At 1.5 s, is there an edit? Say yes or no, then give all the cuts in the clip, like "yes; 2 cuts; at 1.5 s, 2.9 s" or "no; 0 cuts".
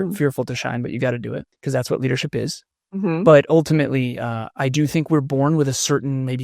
yes; 1 cut; at 1.5 s